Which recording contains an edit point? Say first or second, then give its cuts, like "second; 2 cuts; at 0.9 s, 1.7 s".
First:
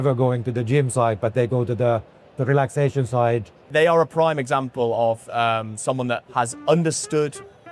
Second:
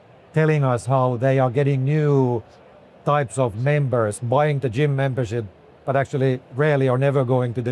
first; 2 cuts; at 3.7 s, 6.2 s